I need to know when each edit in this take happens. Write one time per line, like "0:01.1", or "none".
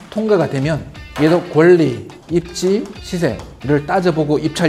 none